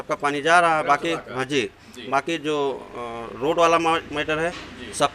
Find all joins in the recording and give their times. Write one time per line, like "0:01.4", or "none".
none